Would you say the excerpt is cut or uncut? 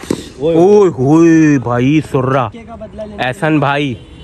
uncut